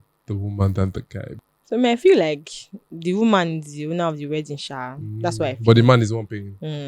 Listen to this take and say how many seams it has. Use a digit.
1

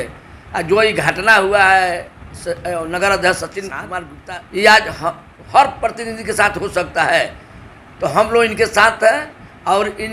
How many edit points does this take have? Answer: 1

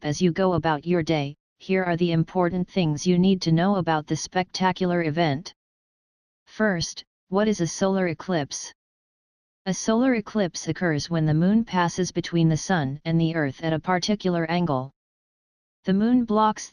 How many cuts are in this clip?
1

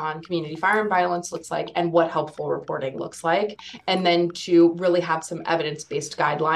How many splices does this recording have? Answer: 1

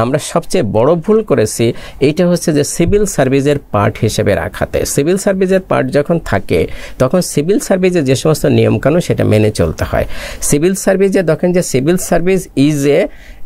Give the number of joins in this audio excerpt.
0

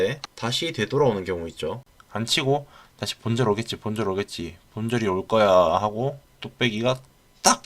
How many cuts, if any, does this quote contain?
1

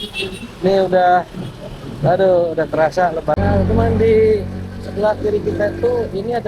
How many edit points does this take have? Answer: 1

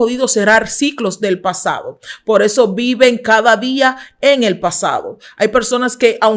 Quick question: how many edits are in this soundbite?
0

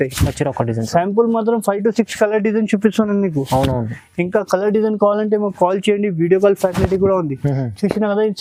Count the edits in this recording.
0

